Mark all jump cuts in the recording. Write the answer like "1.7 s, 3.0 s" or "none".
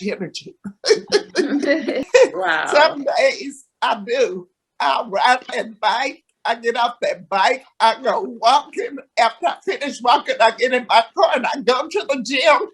2.1 s